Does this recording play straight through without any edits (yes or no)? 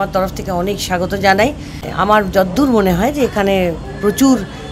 no